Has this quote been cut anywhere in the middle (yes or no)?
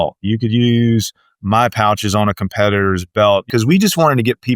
yes